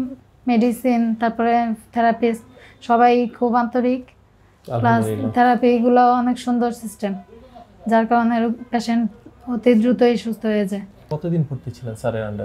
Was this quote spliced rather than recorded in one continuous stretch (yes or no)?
yes